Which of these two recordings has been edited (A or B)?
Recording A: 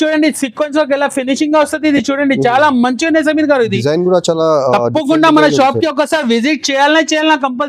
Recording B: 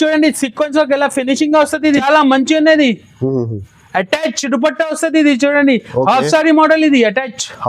B